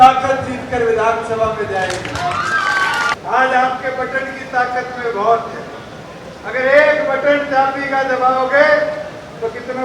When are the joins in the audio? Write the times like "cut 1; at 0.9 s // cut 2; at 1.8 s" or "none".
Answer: cut 1; at 3.1 s